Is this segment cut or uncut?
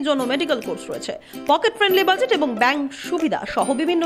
uncut